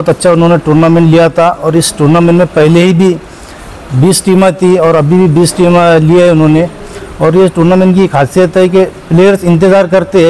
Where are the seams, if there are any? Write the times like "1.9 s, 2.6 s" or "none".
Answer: none